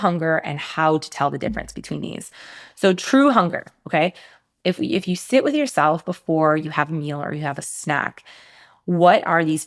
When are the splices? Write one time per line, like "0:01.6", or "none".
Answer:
none